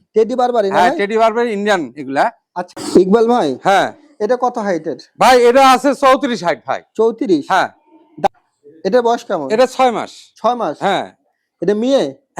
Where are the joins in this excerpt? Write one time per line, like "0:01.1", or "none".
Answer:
0:02.6
0:08.3